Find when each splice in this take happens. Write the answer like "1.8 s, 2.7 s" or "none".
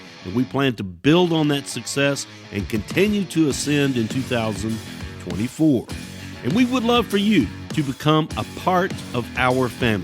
7.6 s, 9.0 s